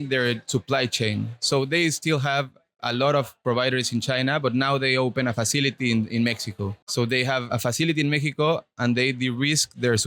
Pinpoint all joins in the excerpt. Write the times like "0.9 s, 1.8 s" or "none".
none